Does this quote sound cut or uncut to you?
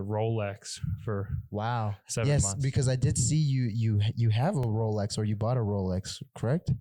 uncut